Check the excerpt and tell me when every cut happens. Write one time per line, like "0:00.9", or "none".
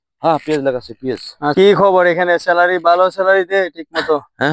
0:01.5